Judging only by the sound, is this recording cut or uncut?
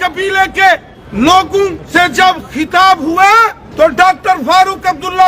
cut